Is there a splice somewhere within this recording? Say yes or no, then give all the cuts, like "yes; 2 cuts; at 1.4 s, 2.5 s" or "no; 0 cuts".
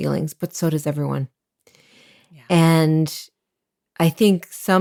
no; 0 cuts